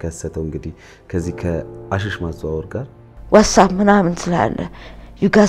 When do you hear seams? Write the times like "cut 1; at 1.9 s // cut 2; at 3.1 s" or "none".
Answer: cut 1; at 3.1 s